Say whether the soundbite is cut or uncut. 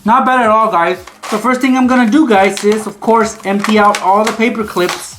cut